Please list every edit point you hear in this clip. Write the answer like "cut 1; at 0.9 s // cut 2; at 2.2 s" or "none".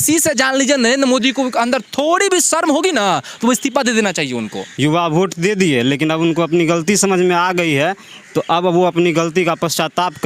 cut 1; at 4.6 s